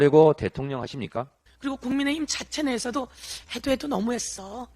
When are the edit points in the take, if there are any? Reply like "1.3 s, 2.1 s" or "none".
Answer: 1.9 s